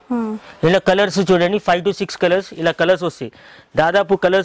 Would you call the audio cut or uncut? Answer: uncut